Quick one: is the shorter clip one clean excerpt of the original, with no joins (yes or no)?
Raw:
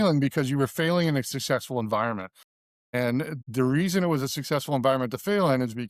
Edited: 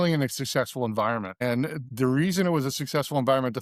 no